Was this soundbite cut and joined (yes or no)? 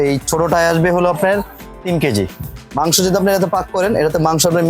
yes